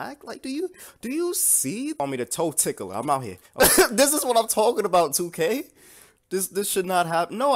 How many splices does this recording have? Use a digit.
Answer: 2